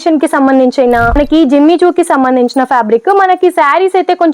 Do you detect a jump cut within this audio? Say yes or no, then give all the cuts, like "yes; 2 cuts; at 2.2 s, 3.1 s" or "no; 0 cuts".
yes; 1 cut; at 1.1 s